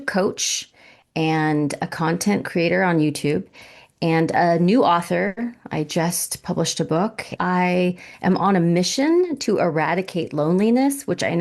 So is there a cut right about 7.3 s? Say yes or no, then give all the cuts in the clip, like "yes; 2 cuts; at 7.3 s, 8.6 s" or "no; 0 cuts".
yes; 1 cut; at 7.3 s